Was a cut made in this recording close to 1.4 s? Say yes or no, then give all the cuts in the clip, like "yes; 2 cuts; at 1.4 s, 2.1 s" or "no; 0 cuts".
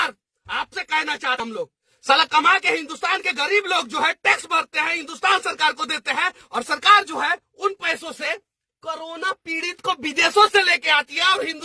yes; 1 cut; at 1.4 s